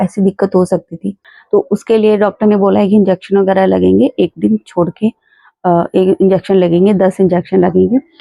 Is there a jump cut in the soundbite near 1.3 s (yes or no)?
yes